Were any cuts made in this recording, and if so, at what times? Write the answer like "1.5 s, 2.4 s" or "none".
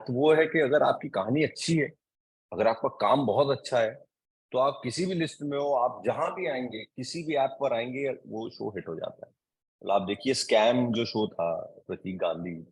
none

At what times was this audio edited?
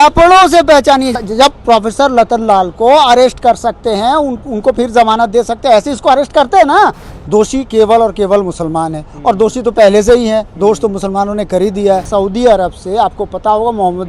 1.2 s, 7.1 s, 12.1 s

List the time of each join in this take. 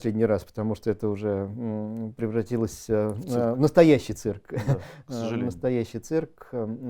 none

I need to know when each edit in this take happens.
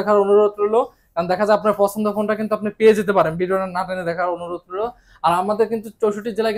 none

